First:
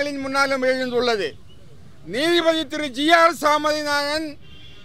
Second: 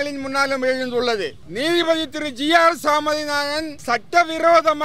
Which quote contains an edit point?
second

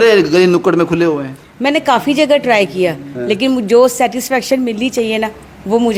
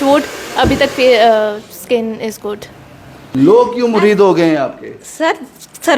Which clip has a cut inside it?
second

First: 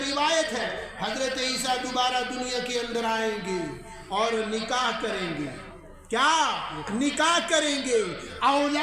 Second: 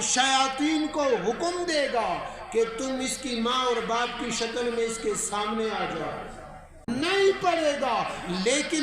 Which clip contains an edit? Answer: second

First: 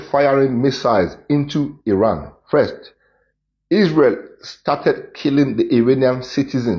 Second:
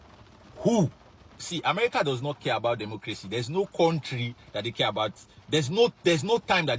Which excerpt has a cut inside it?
second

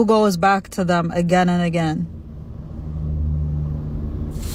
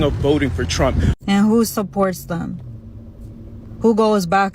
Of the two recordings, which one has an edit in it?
second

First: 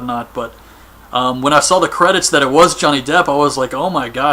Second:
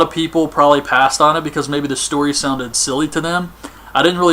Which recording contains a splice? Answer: second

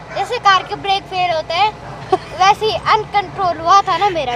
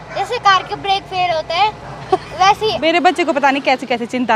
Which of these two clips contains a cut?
second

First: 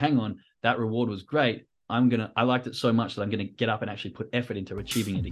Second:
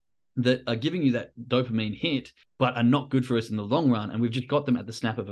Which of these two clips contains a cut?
second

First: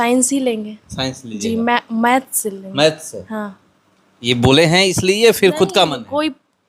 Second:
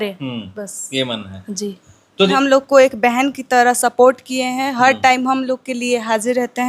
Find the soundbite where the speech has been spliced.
second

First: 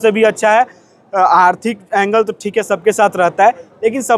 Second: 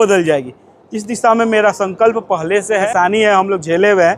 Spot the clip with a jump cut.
second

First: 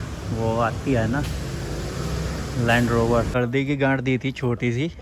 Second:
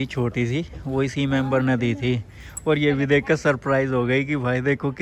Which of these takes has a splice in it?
first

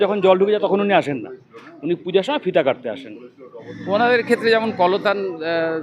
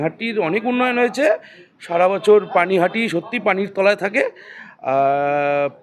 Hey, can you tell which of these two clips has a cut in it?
first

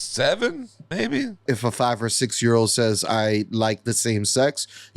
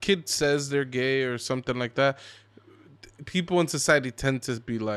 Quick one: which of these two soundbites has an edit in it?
first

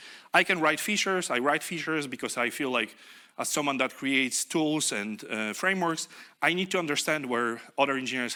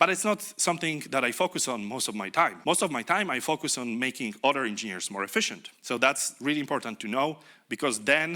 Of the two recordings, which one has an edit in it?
second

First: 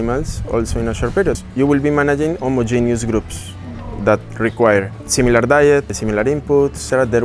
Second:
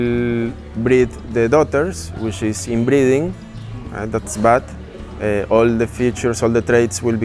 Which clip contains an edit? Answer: first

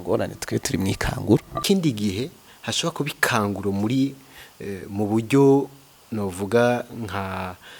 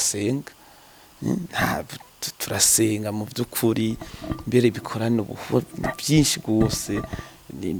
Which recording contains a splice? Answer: first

